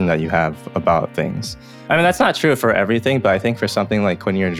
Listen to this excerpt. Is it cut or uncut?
uncut